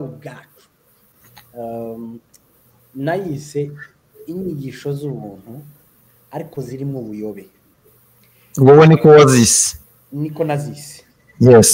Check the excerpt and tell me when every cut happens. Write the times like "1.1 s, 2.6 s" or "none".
1.0 s

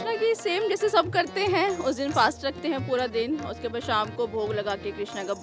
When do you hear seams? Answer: none

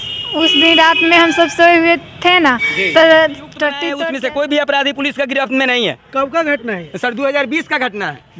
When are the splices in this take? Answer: 3.8 s

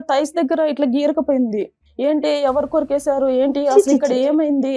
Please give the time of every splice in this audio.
1.8 s

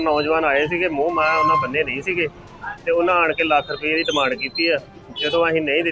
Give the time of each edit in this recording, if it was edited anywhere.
none

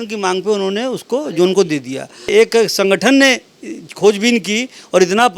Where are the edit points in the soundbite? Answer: 2.3 s

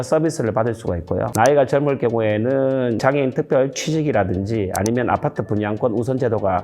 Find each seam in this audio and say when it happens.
1.3 s

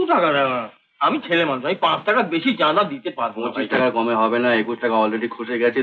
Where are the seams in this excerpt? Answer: none

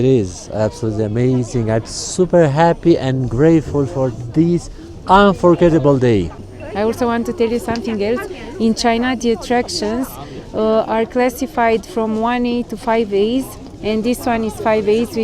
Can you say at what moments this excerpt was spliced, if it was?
none

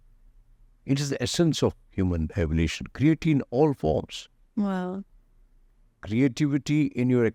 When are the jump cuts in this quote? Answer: none

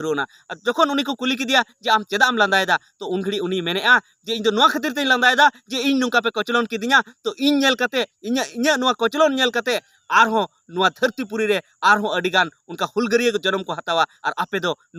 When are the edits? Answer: none

